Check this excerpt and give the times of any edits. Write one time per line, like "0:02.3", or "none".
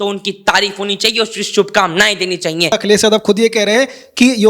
0:02.7